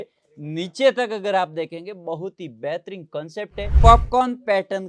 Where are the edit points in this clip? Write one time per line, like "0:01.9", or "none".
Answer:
0:03.6